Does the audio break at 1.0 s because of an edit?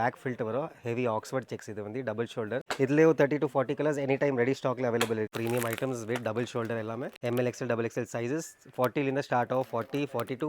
no; 3 cuts; at 2.7 s, 5.3 s, 7.1 s

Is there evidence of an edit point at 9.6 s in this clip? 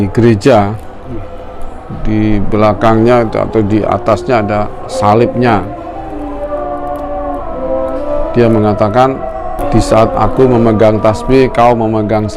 yes; 1 cut; at 9.6 s

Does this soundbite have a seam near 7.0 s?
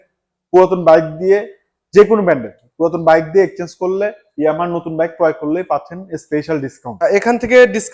yes; 1 cut; at 7.0 s

